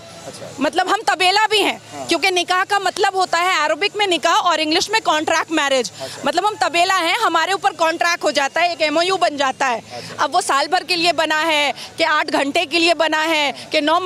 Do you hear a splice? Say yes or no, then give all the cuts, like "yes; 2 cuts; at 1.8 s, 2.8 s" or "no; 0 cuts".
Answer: no; 0 cuts